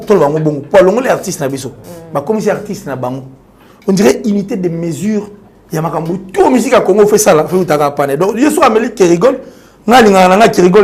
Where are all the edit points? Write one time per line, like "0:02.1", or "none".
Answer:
none